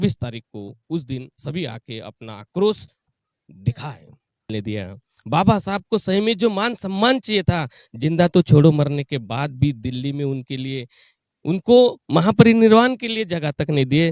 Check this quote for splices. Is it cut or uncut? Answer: cut